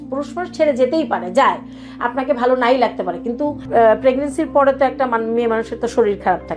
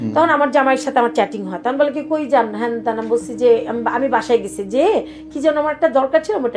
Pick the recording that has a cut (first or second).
first